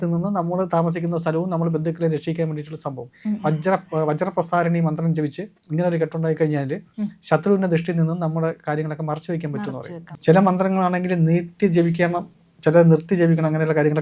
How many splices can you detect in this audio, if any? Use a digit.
1